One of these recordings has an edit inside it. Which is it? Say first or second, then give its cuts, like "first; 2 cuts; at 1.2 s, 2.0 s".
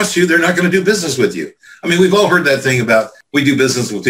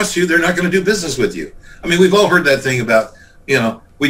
first; 1 cut; at 3.2 s